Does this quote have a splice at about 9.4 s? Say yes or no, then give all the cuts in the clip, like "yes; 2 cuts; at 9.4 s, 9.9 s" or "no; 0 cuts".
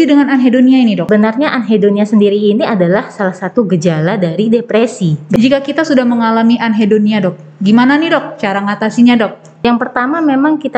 yes; 3 cuts; at 1.0 s, 5.4 s, 9.4 s